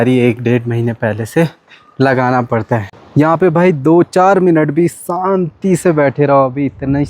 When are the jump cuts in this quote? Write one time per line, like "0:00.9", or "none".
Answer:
0:03.1